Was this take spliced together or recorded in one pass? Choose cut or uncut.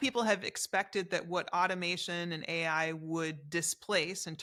uncut